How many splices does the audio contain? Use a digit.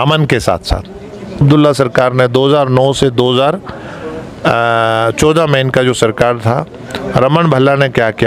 1